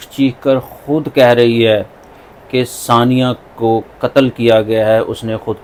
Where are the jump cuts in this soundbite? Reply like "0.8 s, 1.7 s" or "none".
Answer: none